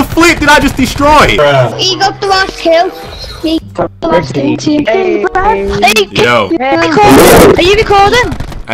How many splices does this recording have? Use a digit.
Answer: 1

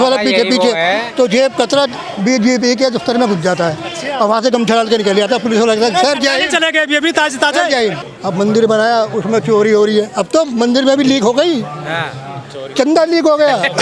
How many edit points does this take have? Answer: 1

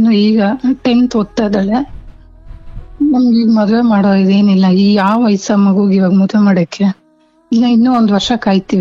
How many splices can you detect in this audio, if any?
0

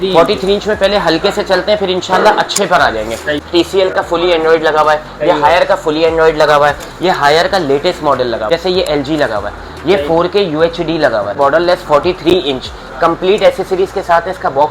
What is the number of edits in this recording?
3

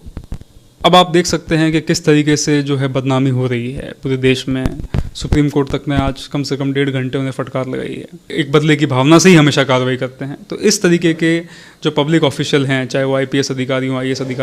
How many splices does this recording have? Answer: 1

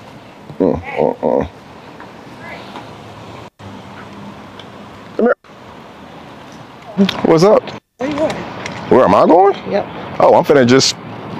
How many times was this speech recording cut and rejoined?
1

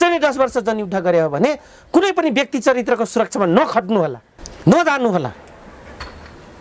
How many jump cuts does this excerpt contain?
0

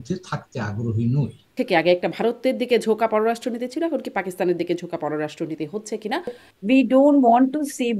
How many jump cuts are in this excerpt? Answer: 2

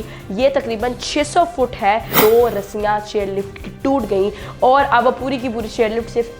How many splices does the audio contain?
1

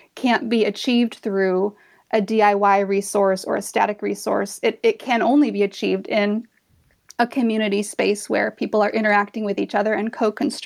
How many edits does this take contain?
0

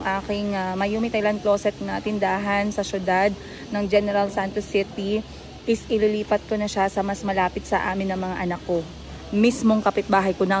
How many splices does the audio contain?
0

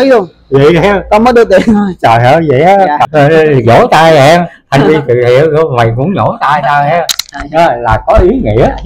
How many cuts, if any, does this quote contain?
1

